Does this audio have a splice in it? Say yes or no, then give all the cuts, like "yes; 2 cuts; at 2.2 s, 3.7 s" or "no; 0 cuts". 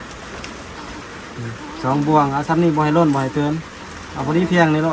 no; 0 cuts